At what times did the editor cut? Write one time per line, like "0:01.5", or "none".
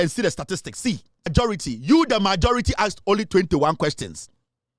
0:01.3